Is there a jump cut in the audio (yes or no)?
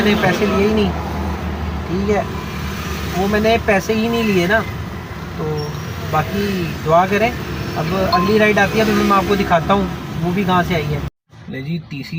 no